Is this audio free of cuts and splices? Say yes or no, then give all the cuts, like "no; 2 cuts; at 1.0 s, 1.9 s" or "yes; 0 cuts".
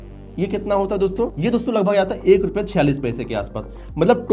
yes; 0 cuts